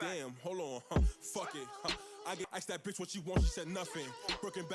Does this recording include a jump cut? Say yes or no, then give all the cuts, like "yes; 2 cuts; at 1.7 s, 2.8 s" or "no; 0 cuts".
yes; 1 cut; at 2.4 s